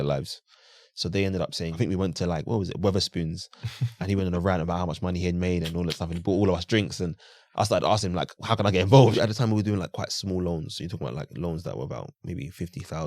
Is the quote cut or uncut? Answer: cut